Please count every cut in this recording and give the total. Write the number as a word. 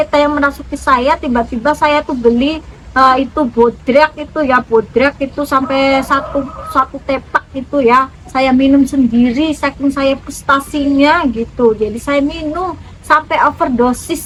zero